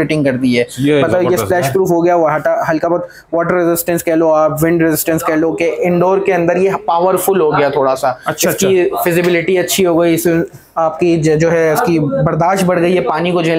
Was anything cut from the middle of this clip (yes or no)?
no